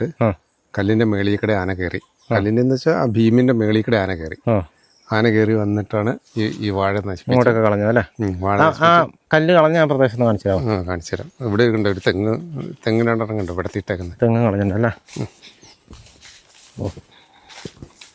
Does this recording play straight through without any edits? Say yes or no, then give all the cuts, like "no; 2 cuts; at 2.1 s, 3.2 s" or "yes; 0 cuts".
yes; 0 cuts